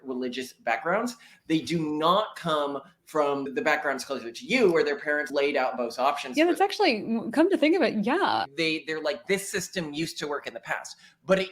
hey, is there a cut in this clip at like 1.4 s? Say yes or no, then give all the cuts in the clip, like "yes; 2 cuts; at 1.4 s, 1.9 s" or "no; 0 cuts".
no; 2 cuts; at 3.5 s, 8.4 s